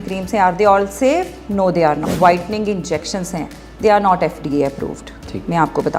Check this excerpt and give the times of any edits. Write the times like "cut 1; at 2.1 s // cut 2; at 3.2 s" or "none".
cut 1; at 2.1 s

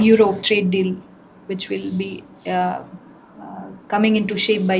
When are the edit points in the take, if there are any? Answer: none

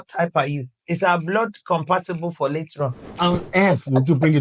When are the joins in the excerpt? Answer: cut 1; at 3.1 s

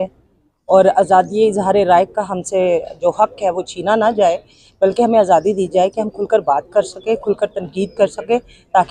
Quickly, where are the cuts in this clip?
none

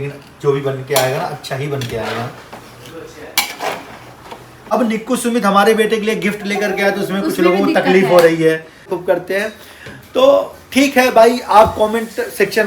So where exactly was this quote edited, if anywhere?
cut 1; at 4.7 s // cut 2; at 8.9 s

